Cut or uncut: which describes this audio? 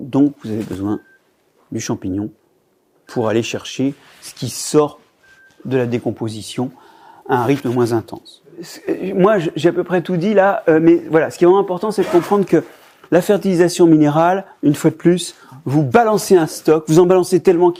uncut